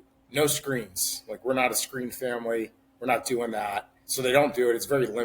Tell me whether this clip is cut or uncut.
cut